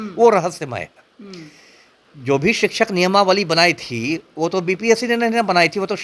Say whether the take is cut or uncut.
uncut